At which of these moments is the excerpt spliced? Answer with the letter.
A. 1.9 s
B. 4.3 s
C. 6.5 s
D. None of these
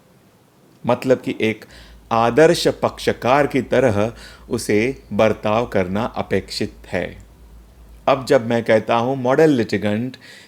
D